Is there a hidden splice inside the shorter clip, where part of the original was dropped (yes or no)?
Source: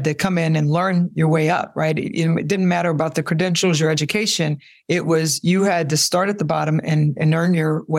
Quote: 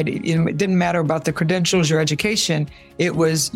no